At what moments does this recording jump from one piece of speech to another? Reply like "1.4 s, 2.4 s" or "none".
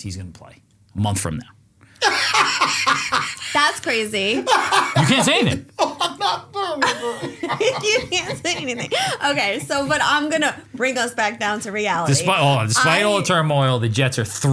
none